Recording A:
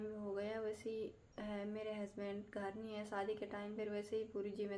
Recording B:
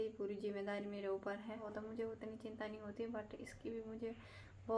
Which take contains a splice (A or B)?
B